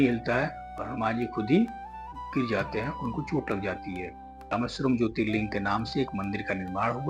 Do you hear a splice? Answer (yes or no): yes